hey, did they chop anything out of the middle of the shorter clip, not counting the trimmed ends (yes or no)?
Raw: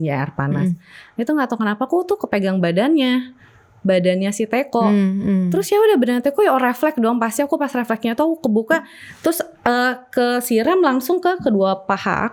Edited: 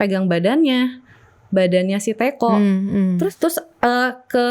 yes